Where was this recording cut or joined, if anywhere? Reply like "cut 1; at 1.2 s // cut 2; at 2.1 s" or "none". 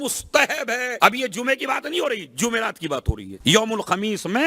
cut 1; at 0.9 s // cut 2; at 3.3 s